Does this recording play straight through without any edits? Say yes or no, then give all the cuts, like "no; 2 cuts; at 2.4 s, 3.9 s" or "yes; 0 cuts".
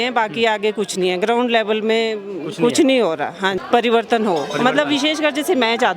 no; 1 cut; at 3.6 s